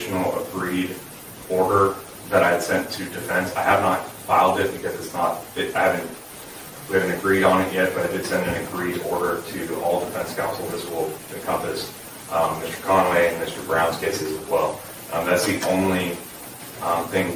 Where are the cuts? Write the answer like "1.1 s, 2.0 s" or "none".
none